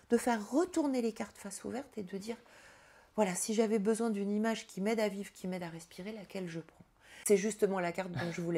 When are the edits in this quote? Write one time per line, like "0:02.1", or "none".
0:07.1